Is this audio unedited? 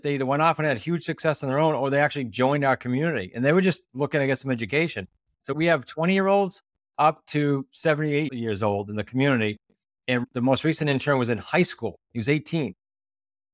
no; 2 cuts; at 5.5 s, 10.2 s

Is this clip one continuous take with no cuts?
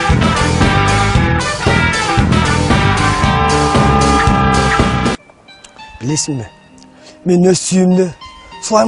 no; 1 cut; at 1.4 s

